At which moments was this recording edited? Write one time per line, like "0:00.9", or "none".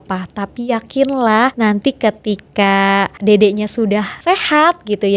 0:01.5
0:03.1
0:04.2